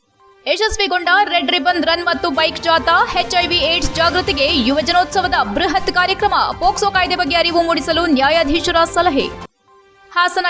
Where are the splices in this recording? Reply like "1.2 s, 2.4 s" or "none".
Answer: none